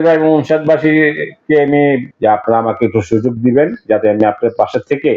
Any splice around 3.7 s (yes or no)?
no